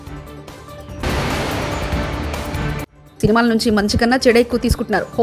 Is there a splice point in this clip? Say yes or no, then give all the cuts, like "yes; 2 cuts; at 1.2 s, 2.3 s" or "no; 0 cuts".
no; 0 cuts